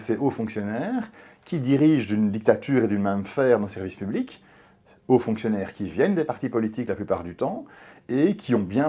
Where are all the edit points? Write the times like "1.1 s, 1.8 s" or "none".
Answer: none